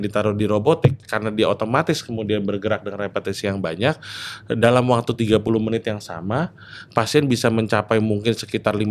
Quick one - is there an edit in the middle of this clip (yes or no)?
no